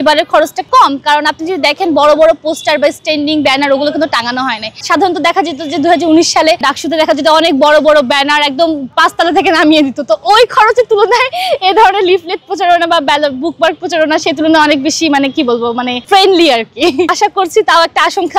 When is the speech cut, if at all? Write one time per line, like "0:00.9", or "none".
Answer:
none